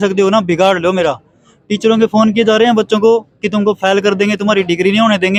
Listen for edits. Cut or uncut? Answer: uncut